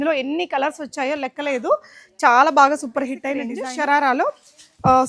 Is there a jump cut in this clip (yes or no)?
yes